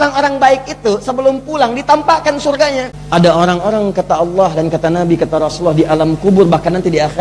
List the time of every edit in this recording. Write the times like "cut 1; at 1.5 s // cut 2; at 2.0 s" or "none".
cut 1; at 3.0 s

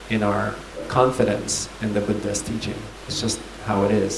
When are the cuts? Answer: cut 1; at 0.9 s // cut 2; at 2.8 s

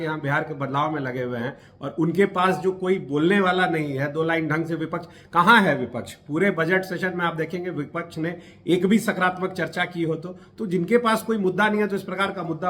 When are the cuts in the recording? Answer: none

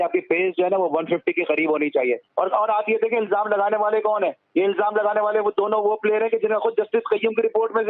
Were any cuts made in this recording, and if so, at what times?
cut 1; at 2.3 s

